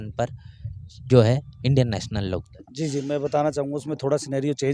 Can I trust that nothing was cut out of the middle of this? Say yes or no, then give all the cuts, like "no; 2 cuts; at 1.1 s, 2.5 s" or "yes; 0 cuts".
yes; 0 cuts